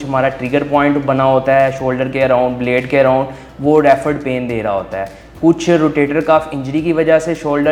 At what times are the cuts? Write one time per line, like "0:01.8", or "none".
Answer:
none